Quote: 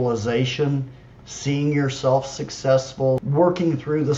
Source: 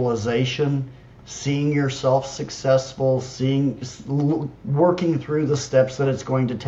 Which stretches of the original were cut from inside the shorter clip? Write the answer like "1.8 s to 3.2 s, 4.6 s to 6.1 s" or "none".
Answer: 3.3 s to 4.7 s

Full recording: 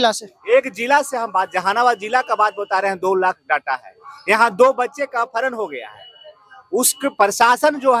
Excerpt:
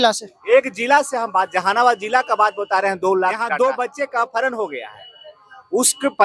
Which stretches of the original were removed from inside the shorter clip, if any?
3.5 s to 4.5 s

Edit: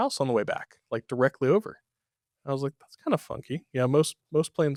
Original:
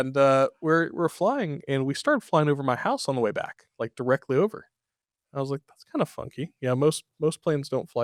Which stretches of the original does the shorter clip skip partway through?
none

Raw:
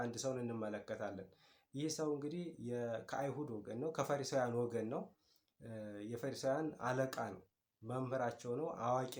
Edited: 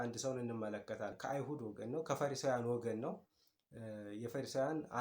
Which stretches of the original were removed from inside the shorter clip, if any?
1.2 s to 3.1 s

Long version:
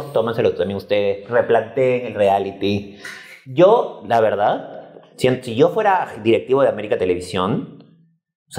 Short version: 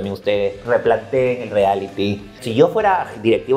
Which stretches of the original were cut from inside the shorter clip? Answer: 3.1 s to 5.4 s

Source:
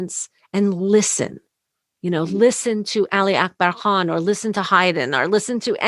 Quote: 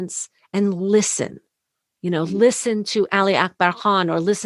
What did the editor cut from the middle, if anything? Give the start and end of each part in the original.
none

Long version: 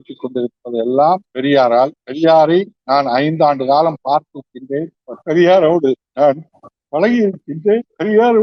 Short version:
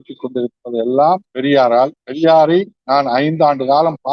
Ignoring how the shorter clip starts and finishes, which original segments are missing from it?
none

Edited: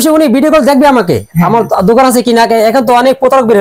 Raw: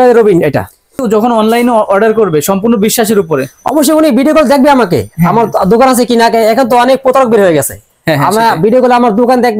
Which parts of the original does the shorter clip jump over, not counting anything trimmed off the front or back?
none

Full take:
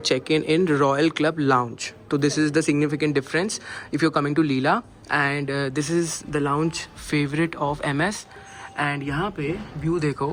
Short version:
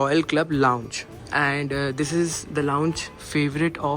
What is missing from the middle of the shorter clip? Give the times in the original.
2.0 s to 4.9 s

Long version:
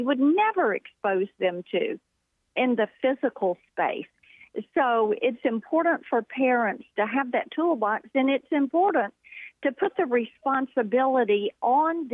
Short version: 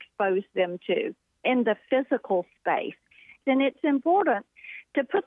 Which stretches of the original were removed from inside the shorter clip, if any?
2.1 s to 2.4 s, 4.5 s to 8.0 s

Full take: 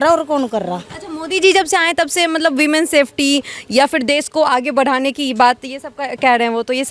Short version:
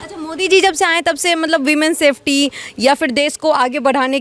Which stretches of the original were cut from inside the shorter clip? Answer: none

